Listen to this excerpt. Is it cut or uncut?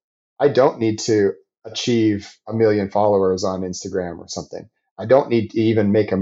uncut